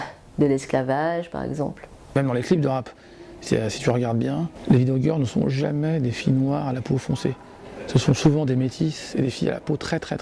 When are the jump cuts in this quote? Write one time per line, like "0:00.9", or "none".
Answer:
0:01.8
0:04.5